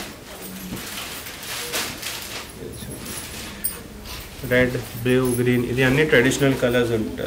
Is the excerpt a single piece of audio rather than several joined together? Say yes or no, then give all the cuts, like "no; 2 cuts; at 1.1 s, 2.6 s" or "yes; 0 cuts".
yes; 0 cuts